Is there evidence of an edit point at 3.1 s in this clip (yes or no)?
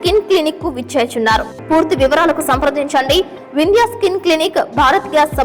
no